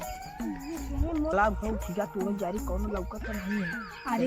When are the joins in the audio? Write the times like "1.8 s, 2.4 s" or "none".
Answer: 1.3 s